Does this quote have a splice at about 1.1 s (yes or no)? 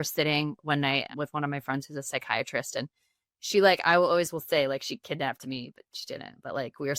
yes